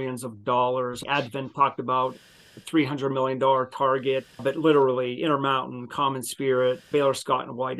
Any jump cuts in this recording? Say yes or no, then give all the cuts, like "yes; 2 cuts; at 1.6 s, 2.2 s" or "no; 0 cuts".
yes; 3 cuts; at 1.0 s, 4.3 s, 6.8 s